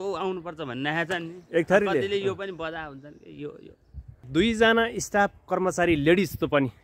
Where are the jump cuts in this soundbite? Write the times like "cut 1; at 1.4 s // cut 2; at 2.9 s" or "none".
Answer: cut 1; at 4.3 s